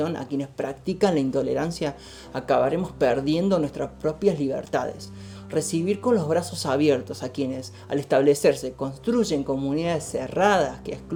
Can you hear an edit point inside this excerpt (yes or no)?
no